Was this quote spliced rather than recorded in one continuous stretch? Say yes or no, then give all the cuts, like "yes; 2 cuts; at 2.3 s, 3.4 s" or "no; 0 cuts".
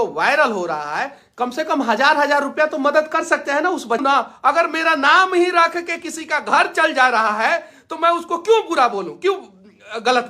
yes; 1 cut; at 4.0 s